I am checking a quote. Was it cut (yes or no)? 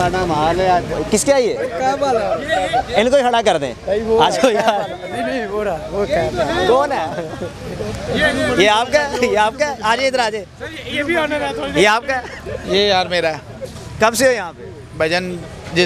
no